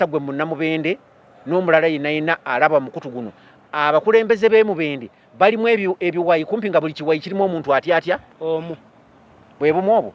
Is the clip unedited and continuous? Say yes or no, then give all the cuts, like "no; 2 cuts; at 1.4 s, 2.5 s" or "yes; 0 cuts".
yes; 0 cuts